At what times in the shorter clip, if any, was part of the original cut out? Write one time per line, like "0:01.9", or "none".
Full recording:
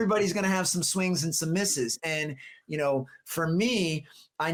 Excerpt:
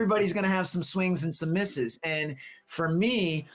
0:02.6